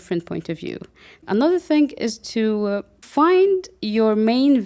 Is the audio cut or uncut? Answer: cut